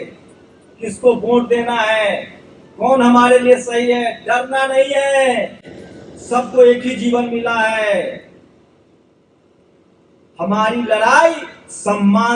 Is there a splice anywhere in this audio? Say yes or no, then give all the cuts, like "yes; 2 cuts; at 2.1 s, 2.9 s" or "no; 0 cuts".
no; 0 cuts